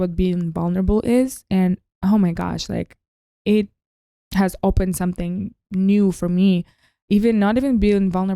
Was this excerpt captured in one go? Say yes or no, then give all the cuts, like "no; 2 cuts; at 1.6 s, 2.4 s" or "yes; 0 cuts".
yes; 0 cuts